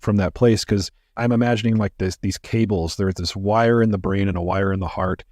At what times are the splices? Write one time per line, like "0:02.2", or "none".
0:01.2